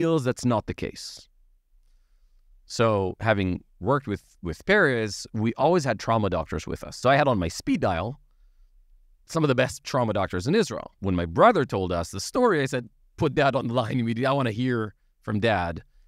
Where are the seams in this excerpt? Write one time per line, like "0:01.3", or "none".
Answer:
0:07.0
0:10.9

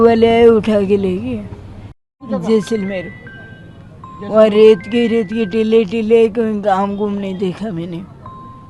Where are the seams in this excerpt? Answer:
0:02.1

